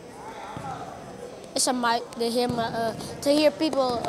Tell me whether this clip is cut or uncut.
uncut